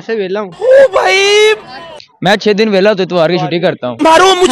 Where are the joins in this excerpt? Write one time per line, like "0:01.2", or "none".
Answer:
none